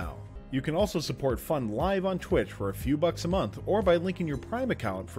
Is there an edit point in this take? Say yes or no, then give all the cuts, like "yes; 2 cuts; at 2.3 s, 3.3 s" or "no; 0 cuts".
no; 0 cuts